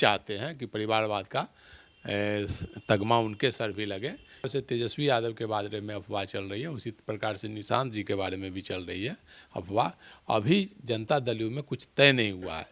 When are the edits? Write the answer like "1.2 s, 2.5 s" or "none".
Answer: 4.5 s